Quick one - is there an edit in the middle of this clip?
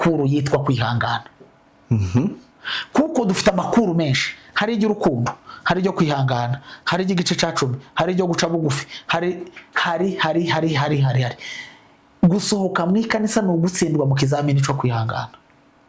no; 0 cuts

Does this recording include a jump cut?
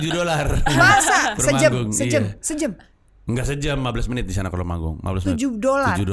no; 0 cuts

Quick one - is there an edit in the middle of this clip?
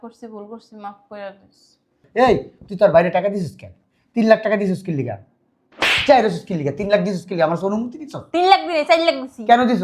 yes; 1 cut; at 2.0 s

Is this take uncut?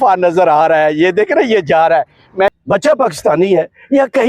no; 1 cut; at 2.5 s

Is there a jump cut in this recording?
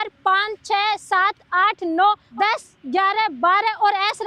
yes; 1 cut; at 2.3 s

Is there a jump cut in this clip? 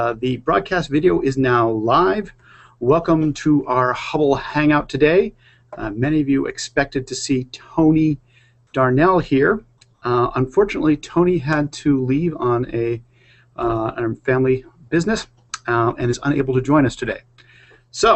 no; 0 cuts

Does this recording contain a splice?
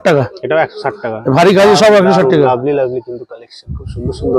no; 0 cuts

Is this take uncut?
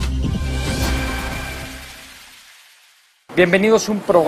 yes; 0 cuts

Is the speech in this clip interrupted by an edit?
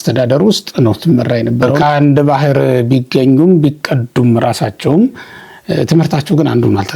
yes; 1 cut; at 1.8 s

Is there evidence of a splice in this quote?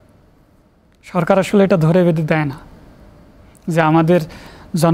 no; 0 cuts

